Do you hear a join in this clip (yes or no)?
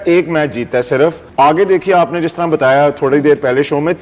yes